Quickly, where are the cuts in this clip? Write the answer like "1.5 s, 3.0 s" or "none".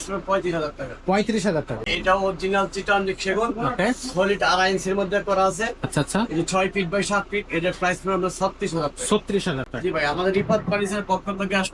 1.9 s